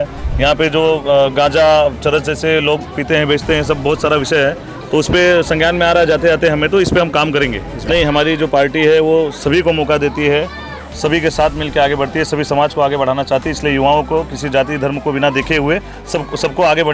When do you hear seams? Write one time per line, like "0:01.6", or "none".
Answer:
0:07.8